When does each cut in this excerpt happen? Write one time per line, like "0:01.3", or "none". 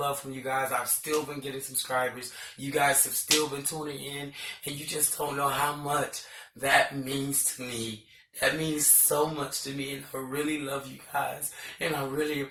none